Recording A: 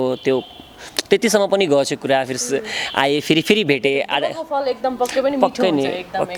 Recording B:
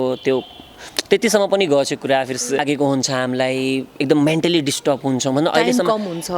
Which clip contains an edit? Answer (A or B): B